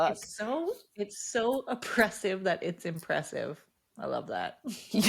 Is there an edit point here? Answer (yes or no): no